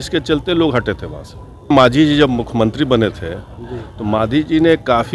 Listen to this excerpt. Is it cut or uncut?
cut